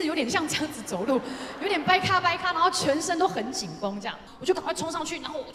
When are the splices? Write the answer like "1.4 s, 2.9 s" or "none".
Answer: 4.3 s